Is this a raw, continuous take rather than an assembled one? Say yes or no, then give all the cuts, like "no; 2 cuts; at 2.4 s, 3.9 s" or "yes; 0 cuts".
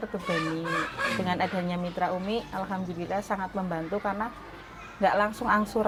yes; 0 cuts